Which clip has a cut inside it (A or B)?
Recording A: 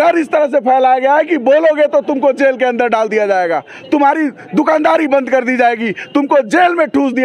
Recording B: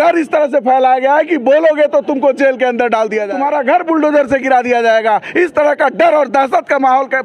B